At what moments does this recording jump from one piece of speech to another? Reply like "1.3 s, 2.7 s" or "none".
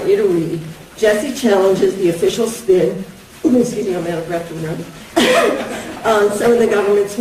1.4 s